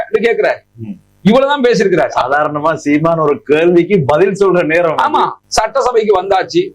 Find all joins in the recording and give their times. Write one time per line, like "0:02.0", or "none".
0:05.4